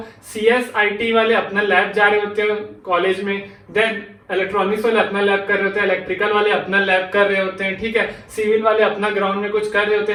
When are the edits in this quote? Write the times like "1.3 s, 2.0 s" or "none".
none